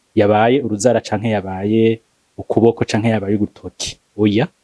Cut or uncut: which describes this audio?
uncut